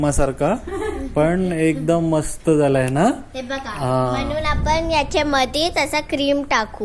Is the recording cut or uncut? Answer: uncut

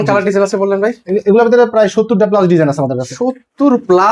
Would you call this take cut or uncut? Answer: uncut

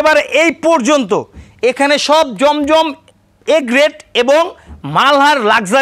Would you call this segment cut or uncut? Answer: uncut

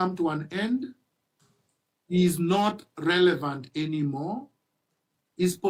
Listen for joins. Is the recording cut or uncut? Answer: uncut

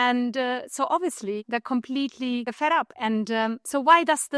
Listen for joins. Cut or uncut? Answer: cut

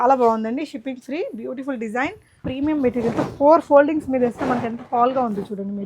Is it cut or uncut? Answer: cut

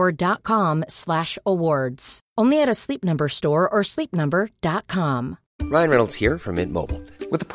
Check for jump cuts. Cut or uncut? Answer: cut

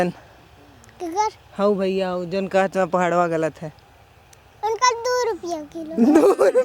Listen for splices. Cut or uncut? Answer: uncut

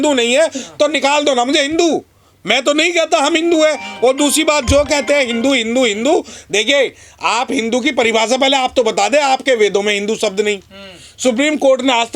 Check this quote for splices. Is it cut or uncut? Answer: uncut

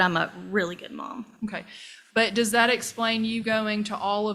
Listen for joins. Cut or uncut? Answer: uncut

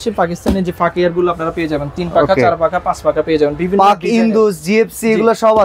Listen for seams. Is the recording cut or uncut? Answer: uncut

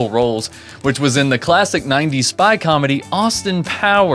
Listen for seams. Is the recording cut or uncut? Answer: uncut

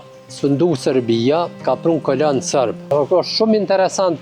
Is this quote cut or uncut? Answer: cut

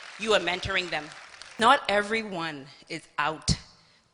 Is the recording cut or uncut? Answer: cut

